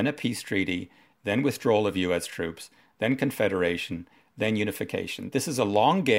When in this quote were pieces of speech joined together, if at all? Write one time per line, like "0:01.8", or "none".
0:05.2